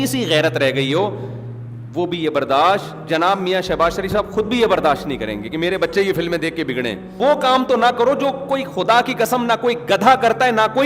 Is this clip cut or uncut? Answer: cut